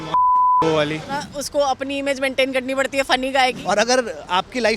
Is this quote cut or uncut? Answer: cut